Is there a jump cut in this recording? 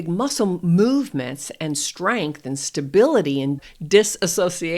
yes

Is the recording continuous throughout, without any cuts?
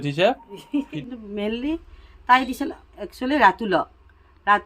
no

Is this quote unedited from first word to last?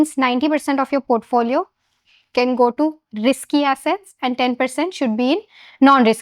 yes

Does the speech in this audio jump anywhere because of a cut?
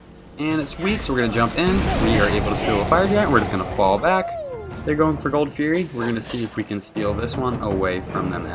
yes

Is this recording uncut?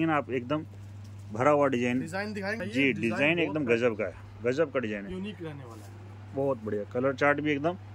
no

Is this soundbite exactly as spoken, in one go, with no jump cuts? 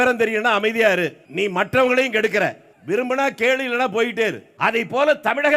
no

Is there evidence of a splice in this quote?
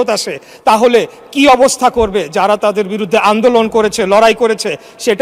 no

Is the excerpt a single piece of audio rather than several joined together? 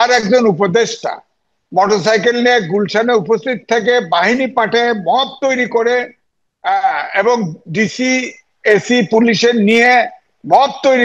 yes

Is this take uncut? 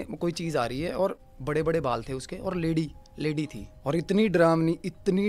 no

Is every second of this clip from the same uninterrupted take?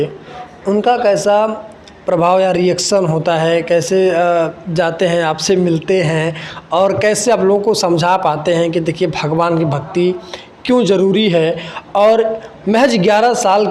yes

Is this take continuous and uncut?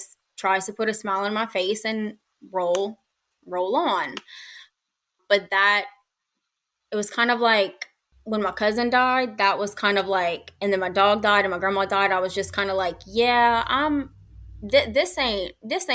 yes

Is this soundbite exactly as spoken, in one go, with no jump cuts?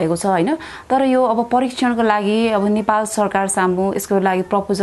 yes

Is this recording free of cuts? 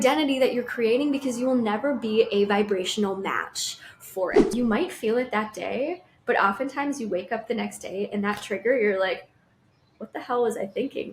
no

